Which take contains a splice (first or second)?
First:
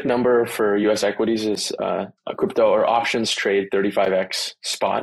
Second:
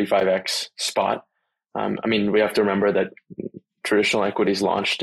first